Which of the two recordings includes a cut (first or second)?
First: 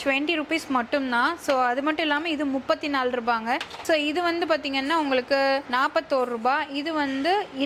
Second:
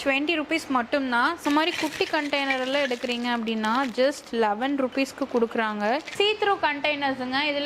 second